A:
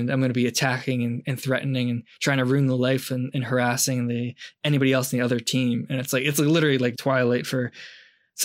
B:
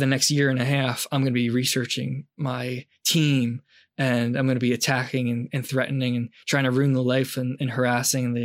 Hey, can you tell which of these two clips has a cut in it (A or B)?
A